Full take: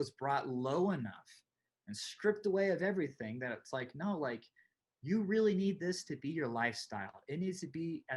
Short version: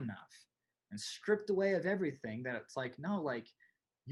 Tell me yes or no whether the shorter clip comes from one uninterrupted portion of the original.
yes